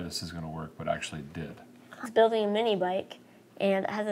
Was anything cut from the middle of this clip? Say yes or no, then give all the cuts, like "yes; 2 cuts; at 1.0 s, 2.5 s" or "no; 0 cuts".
yes; 1 cut; at 1.9 s